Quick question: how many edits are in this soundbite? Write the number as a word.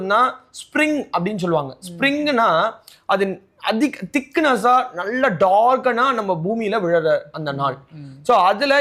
zero